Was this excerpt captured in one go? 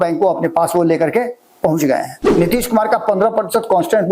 no; 1 cut; at 2.2 s

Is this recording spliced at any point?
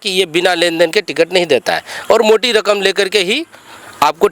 no; 0 cuts

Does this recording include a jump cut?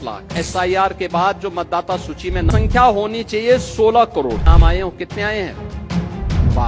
no; 0 cuts

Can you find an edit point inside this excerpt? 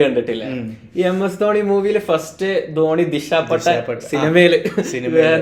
no; 0 cuts

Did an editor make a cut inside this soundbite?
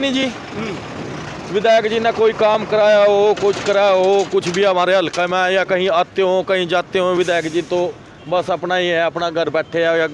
no; 0 cuts

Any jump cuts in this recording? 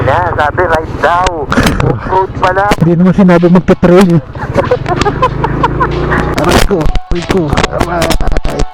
yes; 3 cuts; at 1.5 s, 2.8 s, 6.4 s

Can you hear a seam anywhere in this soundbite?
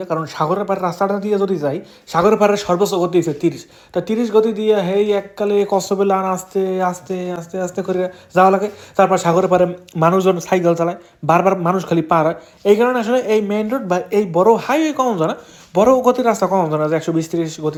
no; 0 cuts

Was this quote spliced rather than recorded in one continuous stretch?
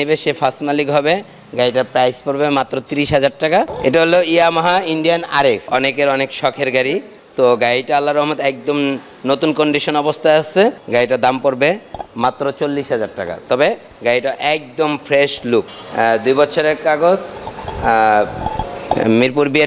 yes; 5 cuts; at 3.7 s, 5.6 s, 7.2 s, 10.8 s, 15.8 s

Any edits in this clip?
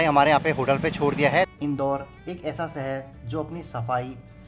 yes; 1 cut; at 1.5 s

